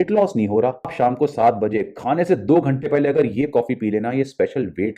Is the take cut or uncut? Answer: cut